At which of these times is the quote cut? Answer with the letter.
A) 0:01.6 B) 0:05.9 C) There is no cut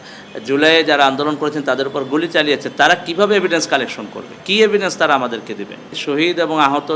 B